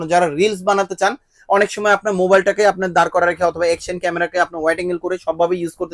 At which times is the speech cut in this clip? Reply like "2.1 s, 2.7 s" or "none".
none